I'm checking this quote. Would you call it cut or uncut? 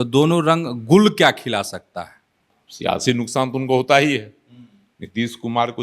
cut